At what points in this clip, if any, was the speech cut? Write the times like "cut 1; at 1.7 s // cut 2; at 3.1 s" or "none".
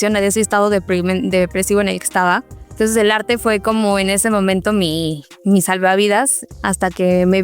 cut 1; at 2.7 s // cut 2; at 6.4 s